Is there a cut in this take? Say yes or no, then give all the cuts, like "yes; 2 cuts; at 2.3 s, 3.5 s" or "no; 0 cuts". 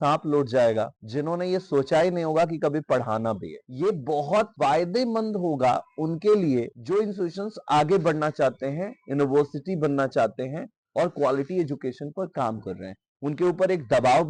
no; 0 cuts